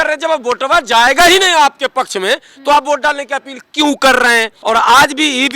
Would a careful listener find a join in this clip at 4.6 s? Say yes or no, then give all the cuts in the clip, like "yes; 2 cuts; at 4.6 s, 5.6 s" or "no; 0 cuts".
yes; 1 cut; at 4.6 s